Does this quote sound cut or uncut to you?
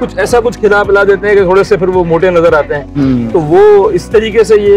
uncut